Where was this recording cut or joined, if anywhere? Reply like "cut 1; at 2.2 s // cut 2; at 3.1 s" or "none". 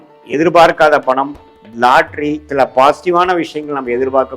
cut 1; at 2.5 s